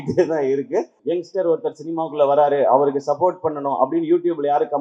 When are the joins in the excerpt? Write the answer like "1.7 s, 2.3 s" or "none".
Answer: 1.0 s